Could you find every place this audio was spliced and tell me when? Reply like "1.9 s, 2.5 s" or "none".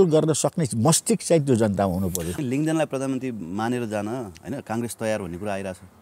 2.3 s